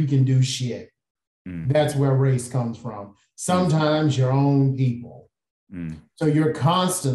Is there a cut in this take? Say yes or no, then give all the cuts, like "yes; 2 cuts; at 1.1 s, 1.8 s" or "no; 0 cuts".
no; 0 cuts